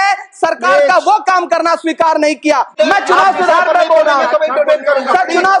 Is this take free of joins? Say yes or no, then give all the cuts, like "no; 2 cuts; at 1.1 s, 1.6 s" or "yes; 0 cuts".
no; 1 cut; at 2.8 s